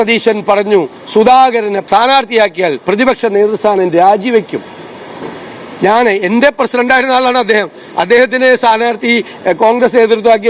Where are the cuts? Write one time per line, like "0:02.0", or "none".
0:01.8